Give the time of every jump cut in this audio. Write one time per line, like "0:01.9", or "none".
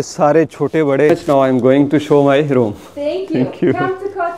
0:01.2